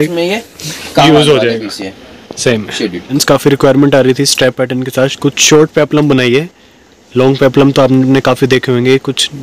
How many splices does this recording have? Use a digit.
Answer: 1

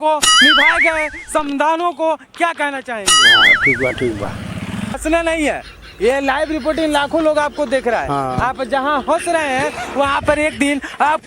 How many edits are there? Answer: 1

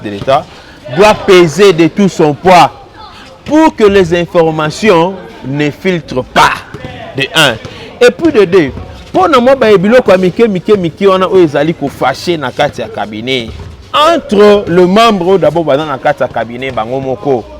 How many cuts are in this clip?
0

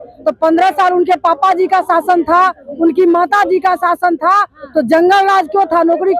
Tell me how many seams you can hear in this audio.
0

